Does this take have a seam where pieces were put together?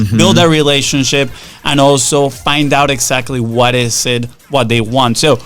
no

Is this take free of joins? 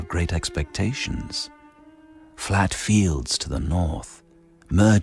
yes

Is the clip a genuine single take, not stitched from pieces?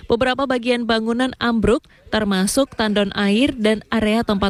yes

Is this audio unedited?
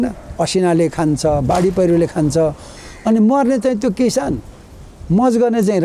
yes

